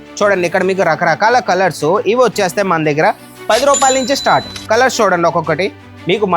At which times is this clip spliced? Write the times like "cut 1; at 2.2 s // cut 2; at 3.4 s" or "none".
none